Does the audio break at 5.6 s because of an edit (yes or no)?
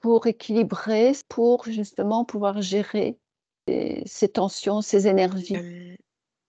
yes